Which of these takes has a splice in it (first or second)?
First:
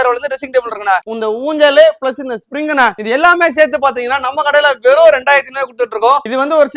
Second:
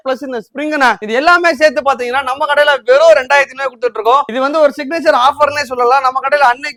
first